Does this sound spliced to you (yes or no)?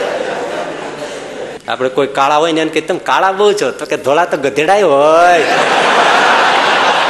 yes